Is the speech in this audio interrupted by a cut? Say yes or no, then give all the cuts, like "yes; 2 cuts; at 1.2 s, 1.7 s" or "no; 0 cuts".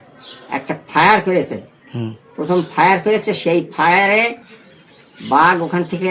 no; 0 cuts